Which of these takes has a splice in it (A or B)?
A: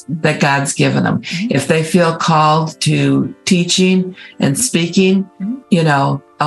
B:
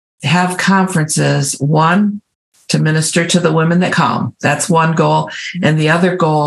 B